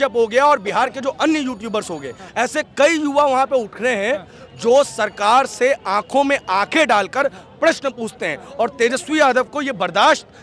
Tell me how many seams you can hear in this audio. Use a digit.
1